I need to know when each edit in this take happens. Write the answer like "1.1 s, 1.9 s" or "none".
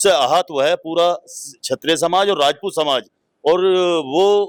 none